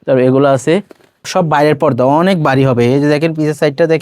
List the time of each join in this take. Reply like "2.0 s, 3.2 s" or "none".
1.2 s